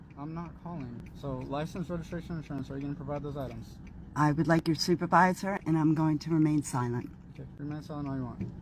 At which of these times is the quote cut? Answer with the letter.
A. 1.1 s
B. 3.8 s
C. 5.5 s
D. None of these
A